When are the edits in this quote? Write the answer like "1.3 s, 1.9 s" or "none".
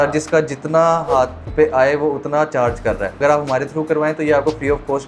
1.4 s, 3.2 s